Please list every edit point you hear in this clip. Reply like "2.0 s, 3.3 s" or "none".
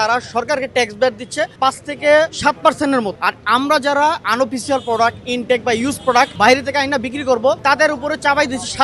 1.5 s, 2.3 s, 3.2 s, 6.3 s, 7.6 s

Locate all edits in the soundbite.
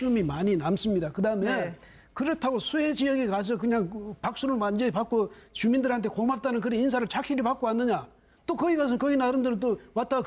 7.6 s

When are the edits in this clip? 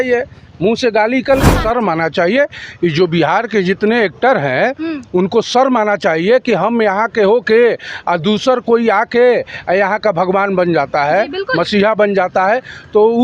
1.5 s

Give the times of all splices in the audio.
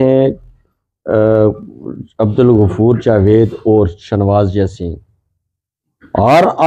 none

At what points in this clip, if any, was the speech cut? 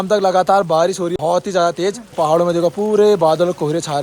1.1 s, 2.1 s

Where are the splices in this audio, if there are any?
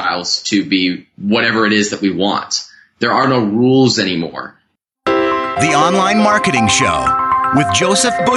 4.8 s

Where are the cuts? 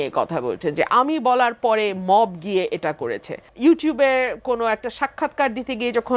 3.4 s

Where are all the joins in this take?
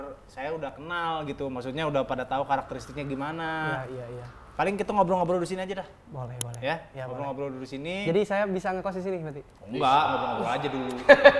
none

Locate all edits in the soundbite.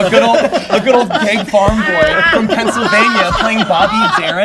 none

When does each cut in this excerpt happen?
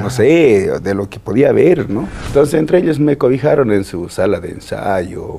2.1 s

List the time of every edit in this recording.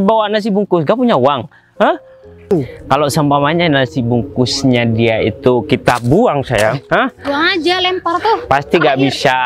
2.5 s

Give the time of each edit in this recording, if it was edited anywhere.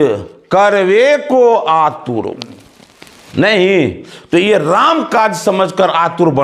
none

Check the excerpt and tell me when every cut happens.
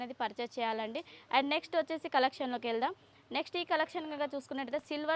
none

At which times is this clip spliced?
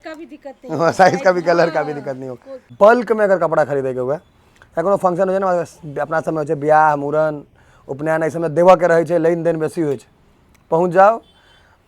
2.6 s

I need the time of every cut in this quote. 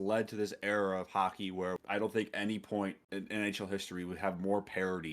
1.8 s, 3.0 s

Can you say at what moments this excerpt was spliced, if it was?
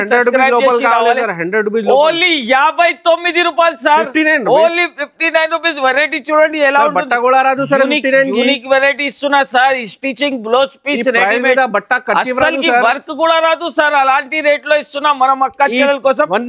none

